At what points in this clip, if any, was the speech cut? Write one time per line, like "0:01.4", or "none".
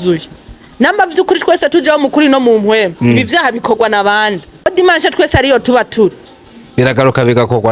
0:04.7